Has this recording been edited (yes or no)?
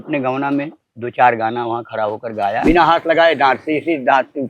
yes